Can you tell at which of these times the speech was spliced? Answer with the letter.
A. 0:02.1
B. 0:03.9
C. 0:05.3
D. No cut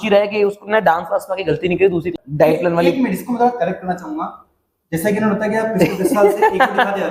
A